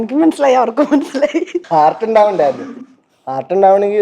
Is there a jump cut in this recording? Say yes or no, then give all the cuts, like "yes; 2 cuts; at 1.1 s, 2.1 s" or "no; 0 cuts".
yes; 1 cut; at 1.6 s